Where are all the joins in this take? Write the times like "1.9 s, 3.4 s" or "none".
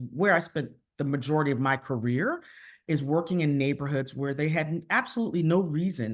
none

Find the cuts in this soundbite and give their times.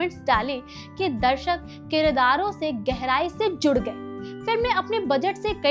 none

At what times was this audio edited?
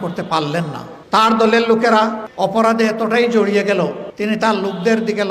0.9 s, 2.2 s, 4.1 s

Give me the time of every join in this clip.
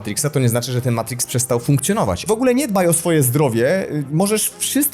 2.2 s

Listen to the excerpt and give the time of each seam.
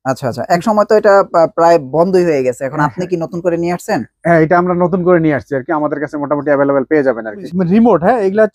7.4 s

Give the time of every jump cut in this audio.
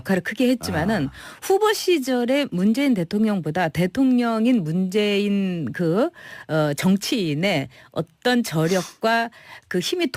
none

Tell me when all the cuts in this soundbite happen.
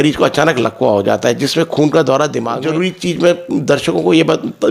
2.6 s

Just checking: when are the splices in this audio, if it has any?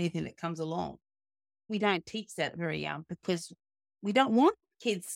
1.7 s

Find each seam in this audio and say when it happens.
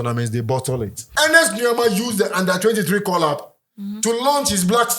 1.0 s

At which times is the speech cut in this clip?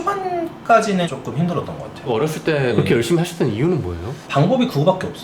2.1 s

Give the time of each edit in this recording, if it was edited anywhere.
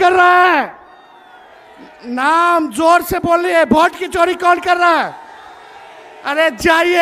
none

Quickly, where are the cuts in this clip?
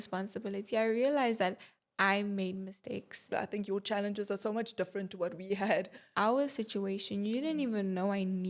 3.2 s, 6.1 s

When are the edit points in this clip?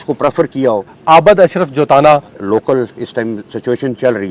0.9 s, 2.4 s

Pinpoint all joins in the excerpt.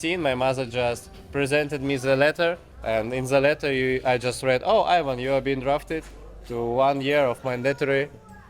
2.7 s

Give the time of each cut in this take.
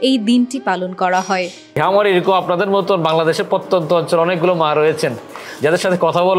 1.8 s

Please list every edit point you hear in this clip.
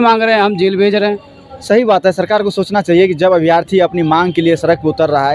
none

